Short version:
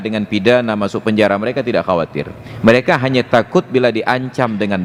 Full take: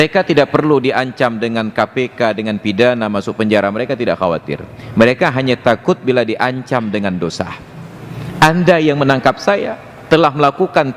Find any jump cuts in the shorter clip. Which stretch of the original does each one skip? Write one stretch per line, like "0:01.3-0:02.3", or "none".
none